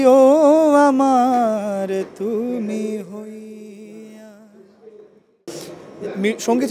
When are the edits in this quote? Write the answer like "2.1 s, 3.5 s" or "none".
5.5 s